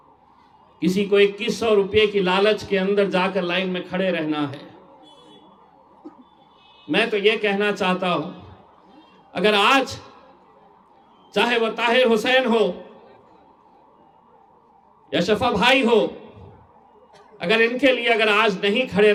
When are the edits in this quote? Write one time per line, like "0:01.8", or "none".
none